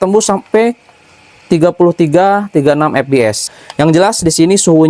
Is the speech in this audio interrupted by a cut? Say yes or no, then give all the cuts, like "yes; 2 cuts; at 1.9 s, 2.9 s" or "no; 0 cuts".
yes; 1 cut; at 3.4 s